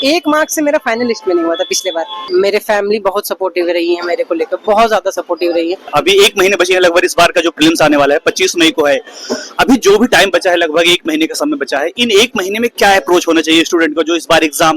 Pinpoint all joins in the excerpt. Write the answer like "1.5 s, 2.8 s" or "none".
2.2 s, 5.9 s